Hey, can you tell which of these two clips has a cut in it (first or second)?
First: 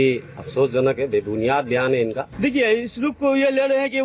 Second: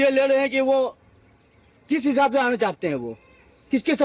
first